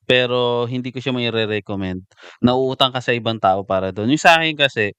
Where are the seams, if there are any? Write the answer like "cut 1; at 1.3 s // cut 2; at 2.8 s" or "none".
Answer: none